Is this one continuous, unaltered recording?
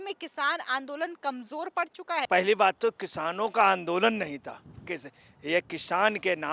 no; 2 cuts; at 2.2 s, 4.8 s

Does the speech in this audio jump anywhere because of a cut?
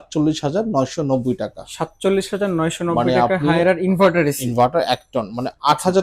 no; 0 cuts

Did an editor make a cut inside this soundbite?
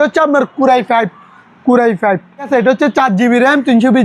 yes; 1 cut; at 2.5 s

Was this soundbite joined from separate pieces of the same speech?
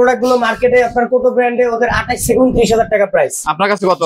no; 0 cuts

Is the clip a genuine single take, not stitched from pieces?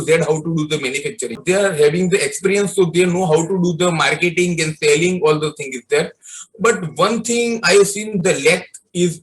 no; 1 cut; at 1.4 s

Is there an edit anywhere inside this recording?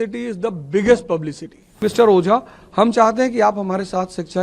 yes; 1 cut; at 1.8 s

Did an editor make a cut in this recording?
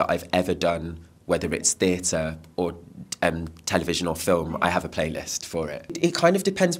no; 0 cuts

